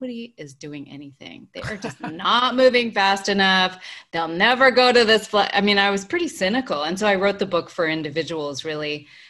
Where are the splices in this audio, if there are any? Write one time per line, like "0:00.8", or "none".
none